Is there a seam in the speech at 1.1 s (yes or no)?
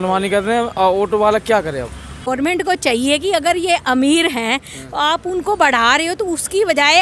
no